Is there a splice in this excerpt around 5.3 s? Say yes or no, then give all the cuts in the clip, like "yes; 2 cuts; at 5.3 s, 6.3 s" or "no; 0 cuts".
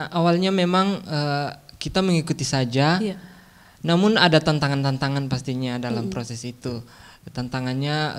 no; 0 cuts